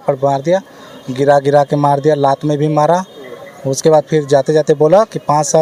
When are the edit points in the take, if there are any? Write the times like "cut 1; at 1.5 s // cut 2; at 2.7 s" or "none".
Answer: none